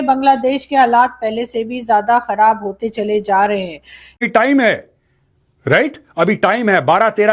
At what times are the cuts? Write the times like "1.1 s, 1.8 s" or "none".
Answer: 4.2 s